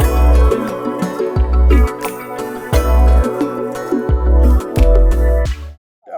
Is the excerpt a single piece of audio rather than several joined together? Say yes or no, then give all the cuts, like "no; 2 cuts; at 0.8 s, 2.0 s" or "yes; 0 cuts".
yes; 0 cuts